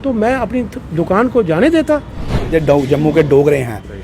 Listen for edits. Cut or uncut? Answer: cut